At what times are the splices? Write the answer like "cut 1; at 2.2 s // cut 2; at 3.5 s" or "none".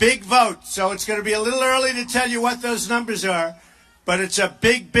none